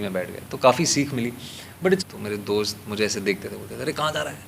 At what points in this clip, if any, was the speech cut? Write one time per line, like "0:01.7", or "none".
0:01.8